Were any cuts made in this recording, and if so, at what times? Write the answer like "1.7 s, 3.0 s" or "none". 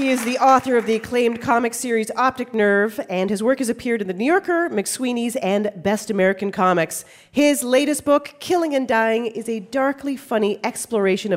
none